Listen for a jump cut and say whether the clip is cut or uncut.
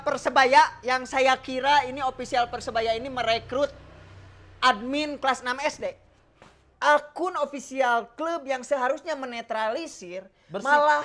cut